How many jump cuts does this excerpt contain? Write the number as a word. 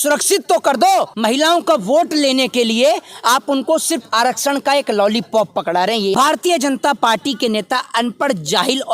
two